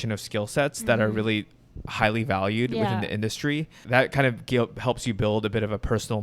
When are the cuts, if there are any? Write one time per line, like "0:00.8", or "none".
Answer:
0:03.8